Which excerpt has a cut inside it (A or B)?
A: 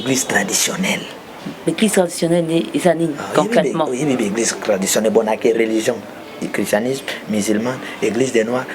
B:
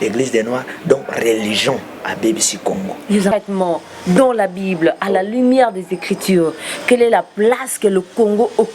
B